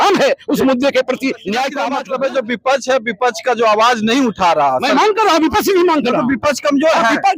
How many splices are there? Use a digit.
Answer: 1